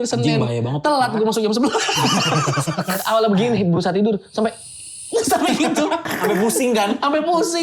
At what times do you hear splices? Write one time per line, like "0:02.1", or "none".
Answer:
0:03.0
0:06.1